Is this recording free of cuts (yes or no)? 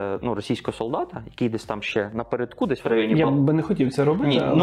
yes